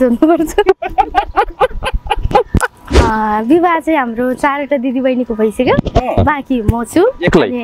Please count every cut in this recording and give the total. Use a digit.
1